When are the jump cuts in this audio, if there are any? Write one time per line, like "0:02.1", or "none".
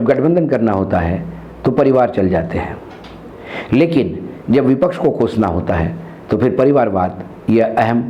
none